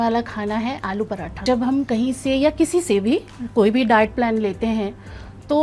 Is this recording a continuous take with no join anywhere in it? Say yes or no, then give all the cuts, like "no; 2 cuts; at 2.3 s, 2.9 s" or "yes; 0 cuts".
no; 1 cut; at 1.4 s